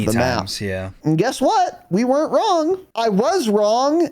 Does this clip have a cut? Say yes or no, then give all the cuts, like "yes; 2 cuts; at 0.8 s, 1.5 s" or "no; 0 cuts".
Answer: yes; 2 cuts; at 0.9 s, 2.9 s